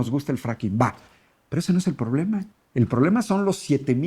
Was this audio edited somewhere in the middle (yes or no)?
yes